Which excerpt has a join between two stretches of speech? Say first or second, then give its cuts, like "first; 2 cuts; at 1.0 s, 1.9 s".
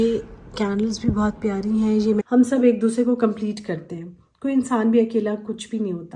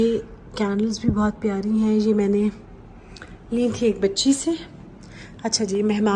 first; 1 cut; at 2.2 s